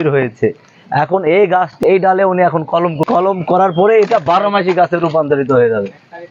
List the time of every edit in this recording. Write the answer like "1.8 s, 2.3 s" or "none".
1.8 s, 3.0 s